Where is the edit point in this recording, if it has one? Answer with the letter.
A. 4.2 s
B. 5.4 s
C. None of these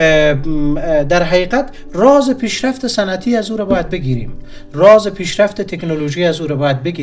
C